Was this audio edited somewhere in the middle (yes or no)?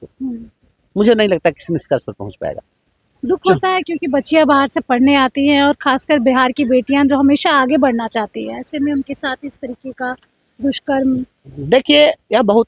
no